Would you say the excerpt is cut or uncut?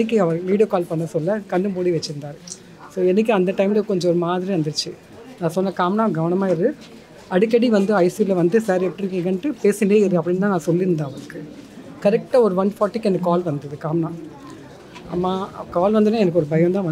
uncut